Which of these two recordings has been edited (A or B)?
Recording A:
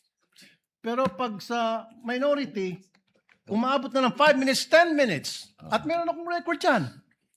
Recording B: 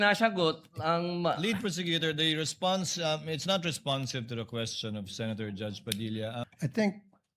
B